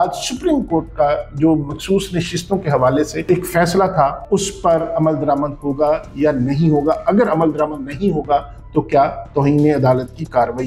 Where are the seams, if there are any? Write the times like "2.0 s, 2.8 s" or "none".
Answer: 3.3 s, 4.2 s